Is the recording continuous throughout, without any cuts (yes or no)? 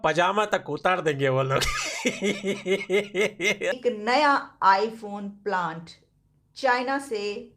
no